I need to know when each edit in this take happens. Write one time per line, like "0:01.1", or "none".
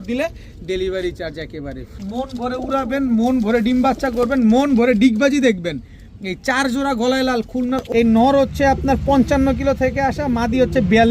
0:01.9
0:07.8